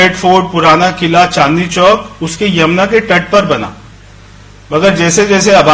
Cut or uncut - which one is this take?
uncut